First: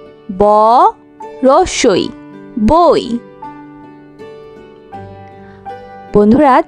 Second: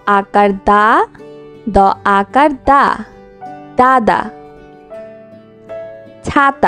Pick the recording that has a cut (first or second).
second